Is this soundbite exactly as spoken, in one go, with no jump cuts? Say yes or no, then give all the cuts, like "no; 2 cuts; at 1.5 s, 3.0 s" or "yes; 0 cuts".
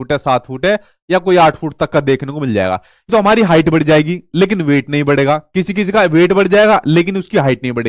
no; 1 cut; at 3.1 s